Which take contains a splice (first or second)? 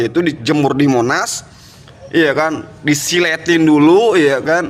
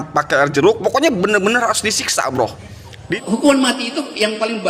second